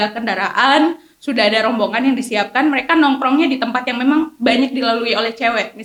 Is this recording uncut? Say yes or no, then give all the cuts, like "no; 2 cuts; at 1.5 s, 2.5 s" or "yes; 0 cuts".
yes; 0 cuts